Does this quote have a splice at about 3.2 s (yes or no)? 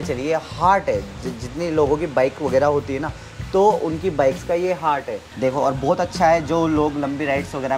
no